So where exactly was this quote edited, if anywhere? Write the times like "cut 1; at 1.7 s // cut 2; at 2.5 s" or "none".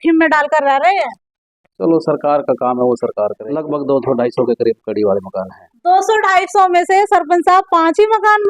cut 1; at 3.5 s